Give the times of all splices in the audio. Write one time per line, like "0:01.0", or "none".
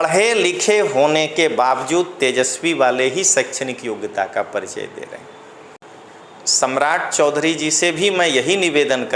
0:05.8

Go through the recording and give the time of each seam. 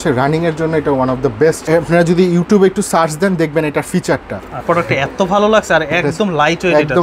0:01.6
0:04.6

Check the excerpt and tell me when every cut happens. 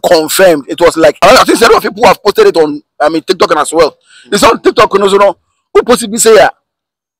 0:01.2

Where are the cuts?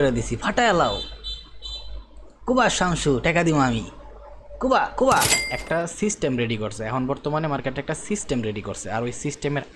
0:05.5

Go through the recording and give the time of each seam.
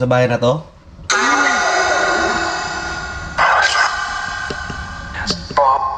none

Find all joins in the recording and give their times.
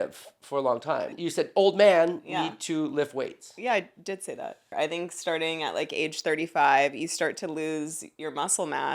0:01.2
0:04.7

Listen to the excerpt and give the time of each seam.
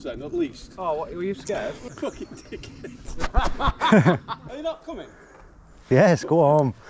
0:01.9
0:04.4

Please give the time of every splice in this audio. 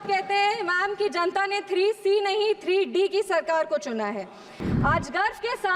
0:04.6

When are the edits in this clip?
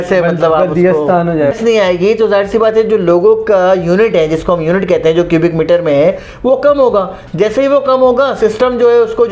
0:01.6

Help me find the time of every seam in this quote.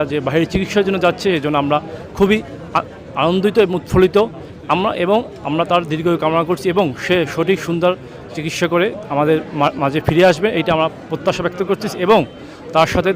none

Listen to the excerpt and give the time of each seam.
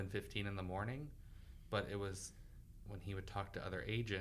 none

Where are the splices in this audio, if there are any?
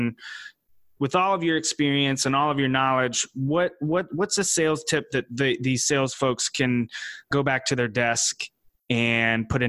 0:07.3

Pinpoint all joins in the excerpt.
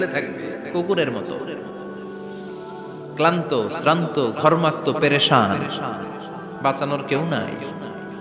none

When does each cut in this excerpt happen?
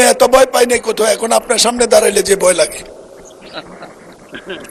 none

